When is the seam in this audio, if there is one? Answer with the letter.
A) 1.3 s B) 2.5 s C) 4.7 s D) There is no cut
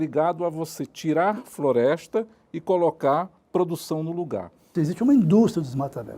C